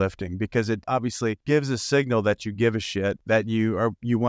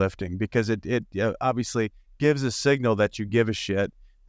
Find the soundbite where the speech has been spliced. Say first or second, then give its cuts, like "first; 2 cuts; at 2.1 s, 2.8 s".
first; 2 cuts; at 1.0 s, 3.2 s